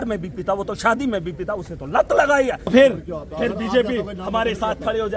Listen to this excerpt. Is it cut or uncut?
cut